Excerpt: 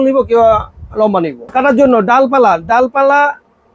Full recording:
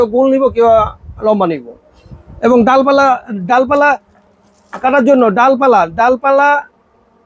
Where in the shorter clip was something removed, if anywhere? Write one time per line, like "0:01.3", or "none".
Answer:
0:01.4